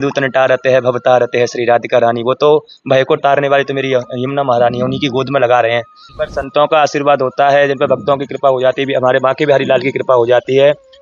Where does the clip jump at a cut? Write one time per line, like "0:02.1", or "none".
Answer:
0:06.0